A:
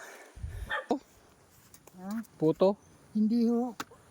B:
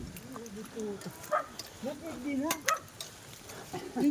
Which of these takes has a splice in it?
A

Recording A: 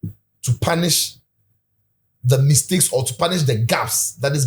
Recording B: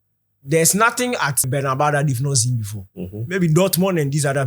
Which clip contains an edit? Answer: B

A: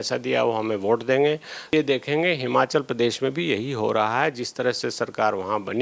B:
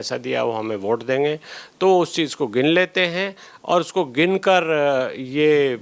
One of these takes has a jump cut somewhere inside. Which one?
A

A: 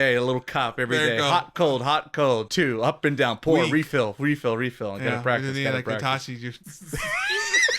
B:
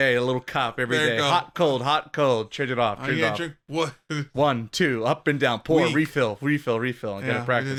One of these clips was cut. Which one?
A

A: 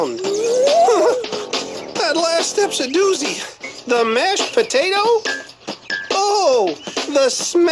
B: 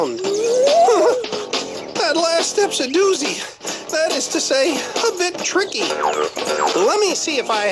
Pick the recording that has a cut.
B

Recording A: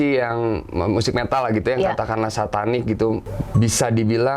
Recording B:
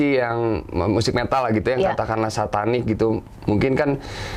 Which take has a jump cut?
A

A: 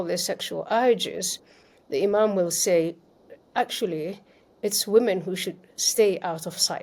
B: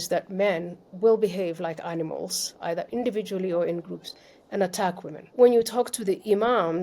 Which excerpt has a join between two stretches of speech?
B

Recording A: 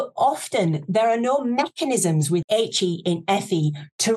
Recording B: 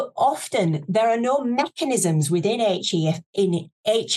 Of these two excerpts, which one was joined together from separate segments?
A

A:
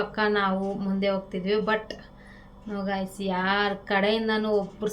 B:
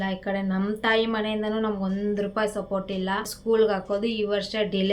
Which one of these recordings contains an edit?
B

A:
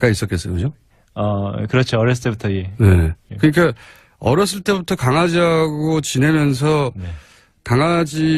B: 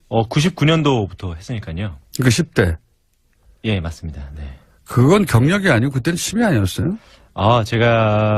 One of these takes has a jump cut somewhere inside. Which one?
B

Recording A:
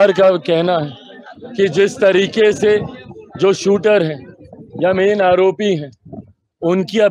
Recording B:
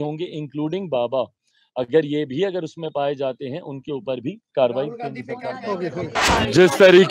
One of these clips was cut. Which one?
B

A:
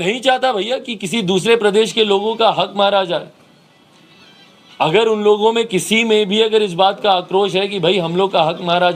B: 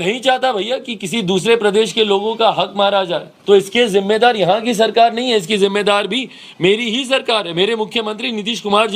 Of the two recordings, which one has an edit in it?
B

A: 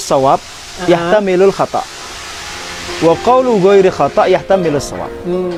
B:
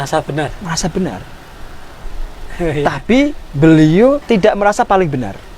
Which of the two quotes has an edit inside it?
B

